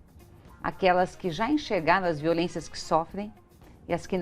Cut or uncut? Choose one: uncut